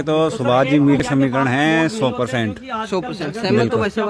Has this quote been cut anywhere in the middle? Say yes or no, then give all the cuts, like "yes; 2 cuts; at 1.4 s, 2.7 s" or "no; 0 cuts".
yes; 1 cut; at 1.0 s